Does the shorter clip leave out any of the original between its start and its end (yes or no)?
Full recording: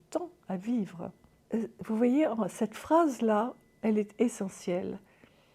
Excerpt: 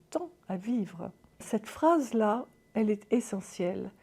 yes